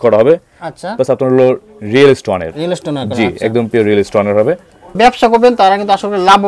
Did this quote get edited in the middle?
yes; 1 cut; at 4.9 s

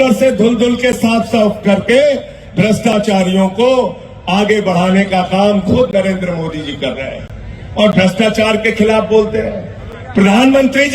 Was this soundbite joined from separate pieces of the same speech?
no; 0 cuts

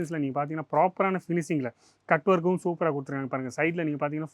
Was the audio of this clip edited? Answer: no; 0 cuts

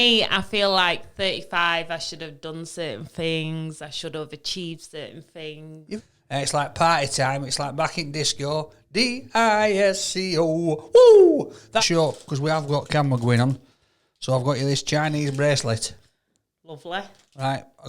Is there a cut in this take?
yes; 2 cuts; at 5.9 s, 11.8 s

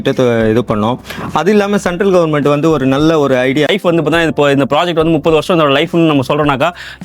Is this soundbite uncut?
no; 1 cut; at 3.7 s

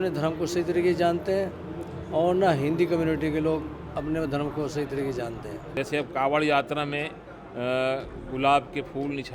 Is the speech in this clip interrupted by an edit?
yes; 1 cut; at 5.8 s

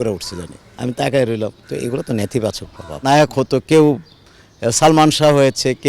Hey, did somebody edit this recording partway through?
yes; 2 cuts; at 1.6 s, 3.0 s

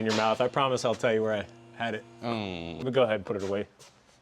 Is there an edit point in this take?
yes; 1 cut; at 2.7 s

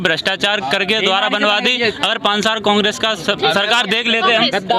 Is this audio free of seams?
yes; 0 cuts

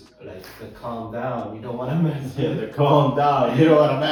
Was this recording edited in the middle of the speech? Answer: no; 0 cuts

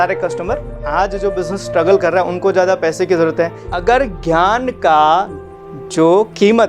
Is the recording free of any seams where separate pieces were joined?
no; 2 cuts; at 0.9 s, 3.6 s

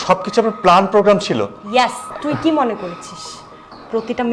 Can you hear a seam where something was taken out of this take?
yes; 1 cut; at 2.1 s

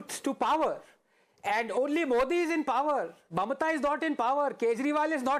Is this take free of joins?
yes; 0 cuts

